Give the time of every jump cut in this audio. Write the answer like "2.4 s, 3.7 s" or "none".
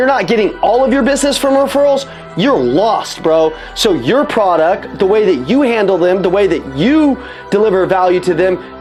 none